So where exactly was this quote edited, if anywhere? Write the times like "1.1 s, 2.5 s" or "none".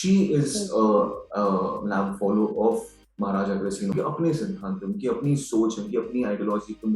3.9 s